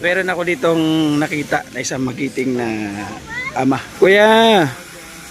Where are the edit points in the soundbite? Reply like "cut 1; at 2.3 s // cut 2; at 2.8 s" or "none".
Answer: cut 1; at 3.9 s